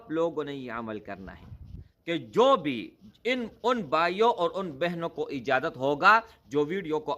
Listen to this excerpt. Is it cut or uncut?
cut